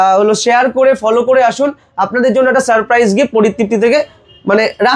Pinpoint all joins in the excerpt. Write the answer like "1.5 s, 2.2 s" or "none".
none